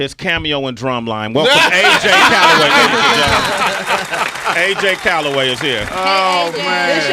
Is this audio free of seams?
no; 1 cut; at 3.8 s

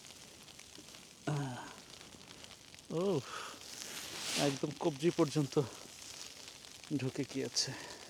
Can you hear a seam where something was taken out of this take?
no; 0 cuts

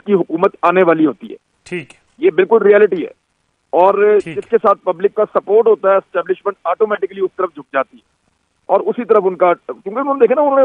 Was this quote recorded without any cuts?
yes; 0 cuts

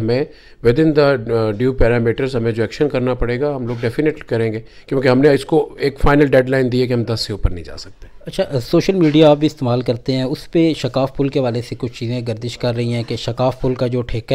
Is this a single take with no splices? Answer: yes; 0 cuts

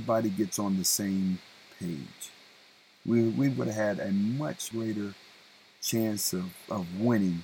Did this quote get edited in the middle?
yes; 1 cut; at 4.7 s

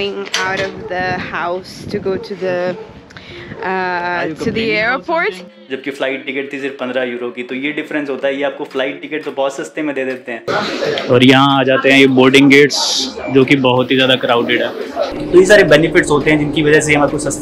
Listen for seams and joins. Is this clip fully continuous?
no; 3 cuts; at 5.5 s, 10.3 s, 15.2 s

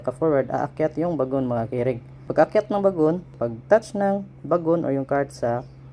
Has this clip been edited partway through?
yes; 2 cuts; at 2.1 s, 3.3 s

